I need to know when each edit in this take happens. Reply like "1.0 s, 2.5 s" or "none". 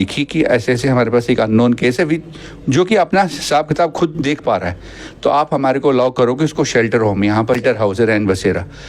7.6 s